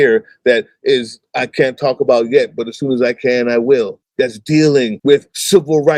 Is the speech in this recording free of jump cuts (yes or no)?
no